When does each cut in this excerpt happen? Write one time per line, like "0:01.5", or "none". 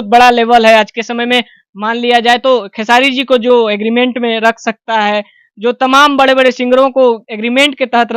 none